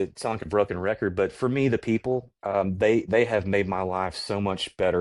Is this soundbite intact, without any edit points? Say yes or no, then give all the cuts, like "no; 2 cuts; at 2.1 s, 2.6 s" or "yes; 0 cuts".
yes; 0 cuts